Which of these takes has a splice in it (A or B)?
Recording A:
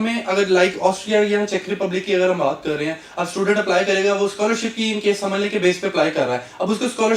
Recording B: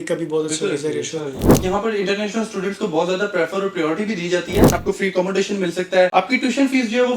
B